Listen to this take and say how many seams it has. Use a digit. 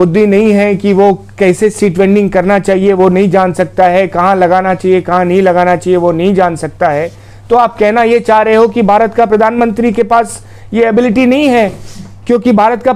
0